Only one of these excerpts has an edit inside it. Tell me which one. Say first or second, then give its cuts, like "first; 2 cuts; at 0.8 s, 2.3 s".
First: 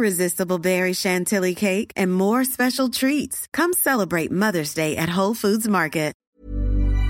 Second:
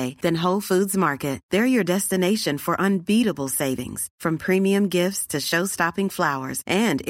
first; 1 cut; at 6.2 s